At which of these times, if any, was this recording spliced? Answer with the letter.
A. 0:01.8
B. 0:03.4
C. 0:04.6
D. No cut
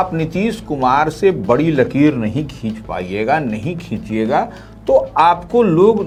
D